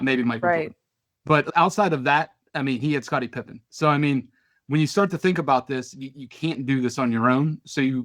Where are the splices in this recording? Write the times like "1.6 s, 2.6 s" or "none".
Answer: 1.5 s